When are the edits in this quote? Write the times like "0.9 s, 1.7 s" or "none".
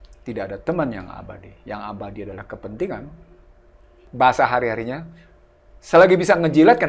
4.1 s